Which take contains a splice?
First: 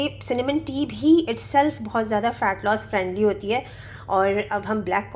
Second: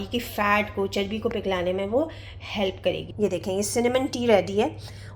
second; 1 cut; at 3.1 s

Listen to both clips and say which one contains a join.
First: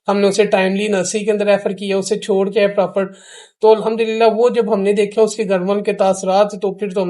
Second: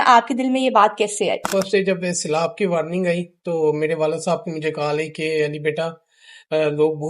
second; 1 cut; at 1.5 s

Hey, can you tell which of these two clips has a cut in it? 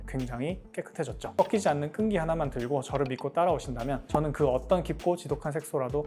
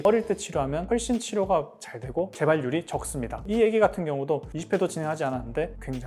first; 1 cut; at 1.3 s

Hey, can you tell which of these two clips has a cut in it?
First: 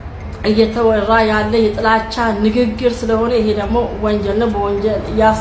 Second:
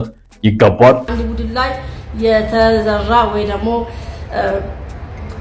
second; 1 cut; at 1.1 s

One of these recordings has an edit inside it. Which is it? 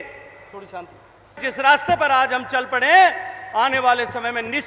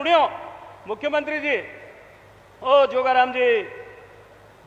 first; 1 cut; at 1.4 s

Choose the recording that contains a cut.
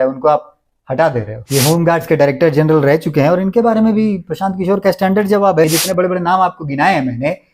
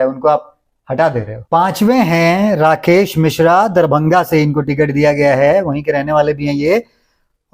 first; 2 cuts; at 1.4 s, 5.6 s

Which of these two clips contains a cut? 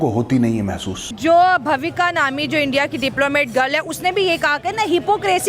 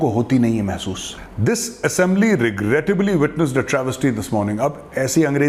first; 1 cut; at 1.1 s

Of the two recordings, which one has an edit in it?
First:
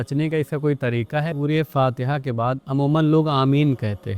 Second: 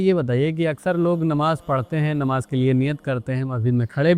first; 1 cut; at 1.3 s

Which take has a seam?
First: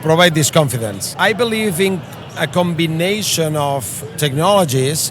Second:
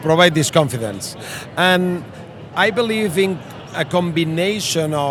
first; 1 cut; at 1.0 s

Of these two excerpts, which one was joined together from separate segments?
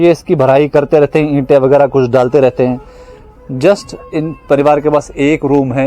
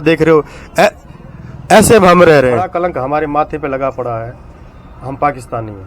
second; 1 cut; at 2.7 s

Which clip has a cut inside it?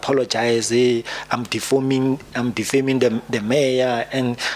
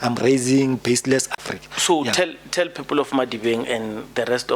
second; 1 cut; at 1.3 s

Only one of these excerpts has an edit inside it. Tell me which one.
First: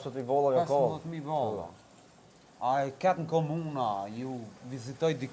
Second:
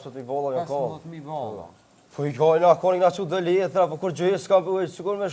second; 1 cut; at 2.0 s

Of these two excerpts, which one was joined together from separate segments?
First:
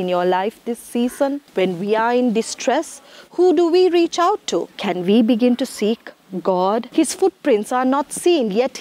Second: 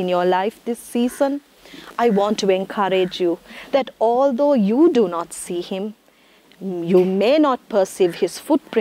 first; 3 cuts; at 1.5 s, 4.8 s, 6.9 s

